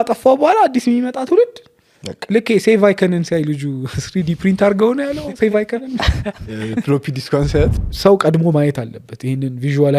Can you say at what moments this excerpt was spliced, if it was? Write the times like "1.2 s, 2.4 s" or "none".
7.8 s